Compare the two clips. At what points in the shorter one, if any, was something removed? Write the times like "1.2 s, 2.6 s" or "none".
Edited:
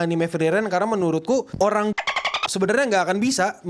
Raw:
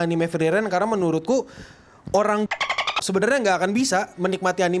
1.5 s

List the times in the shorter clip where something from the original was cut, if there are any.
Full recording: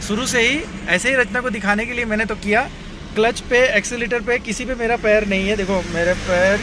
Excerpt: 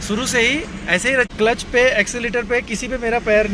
1.3 s

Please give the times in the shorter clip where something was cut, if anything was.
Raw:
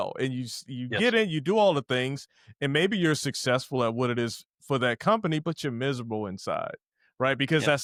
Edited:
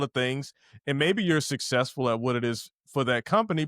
none

